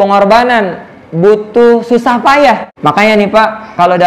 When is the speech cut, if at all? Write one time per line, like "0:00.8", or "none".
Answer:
0:02.7